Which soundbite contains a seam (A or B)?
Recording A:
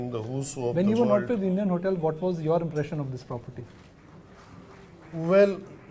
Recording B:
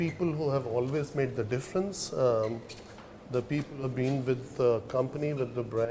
A